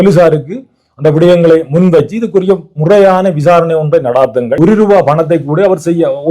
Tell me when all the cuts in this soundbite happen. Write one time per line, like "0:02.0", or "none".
0:04.5